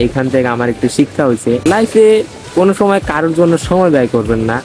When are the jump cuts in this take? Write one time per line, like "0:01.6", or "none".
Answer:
none